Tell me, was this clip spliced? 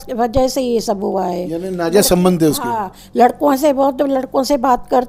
no; 0 cuts

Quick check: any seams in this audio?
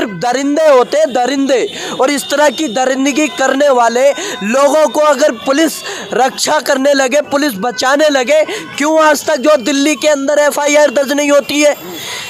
no; 0 cuts

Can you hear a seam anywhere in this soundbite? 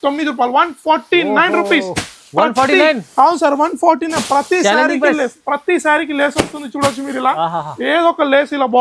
no; 0 cuts

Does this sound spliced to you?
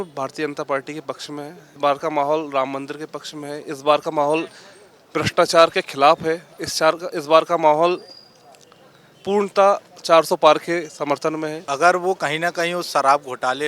yes; 2 cuts; at 1.7 s, 11.6 s

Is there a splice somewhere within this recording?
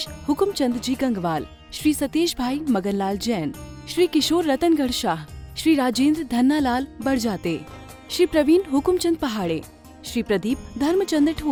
no; 0 cuts

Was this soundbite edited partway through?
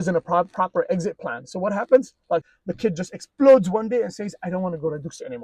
yes; 1 cut; at 2.5 s

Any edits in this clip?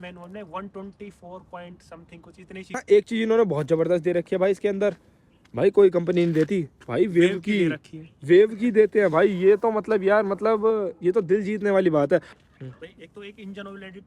yes; 2 cuts; at 2.8 s, 12.3 s

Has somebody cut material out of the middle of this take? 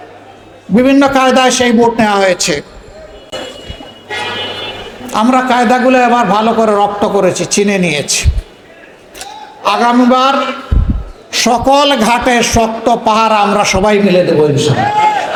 no; 0 cuts

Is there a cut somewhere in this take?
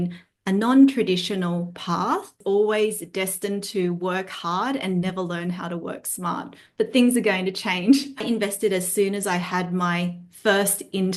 yes; 2 cuts; at 2.4 s, 8.2 s

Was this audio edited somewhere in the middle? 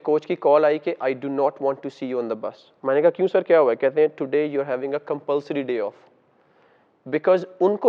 no; 0 cuts

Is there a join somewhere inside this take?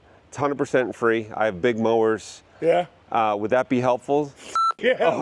no; 0 cuts

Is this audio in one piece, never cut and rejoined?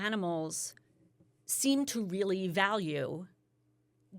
yes; 0 cuts

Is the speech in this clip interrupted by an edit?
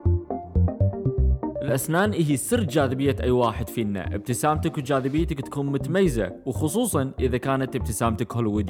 yes; 1 cut; at 1.6 s

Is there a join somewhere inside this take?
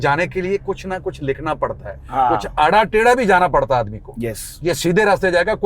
no; 0 cuts

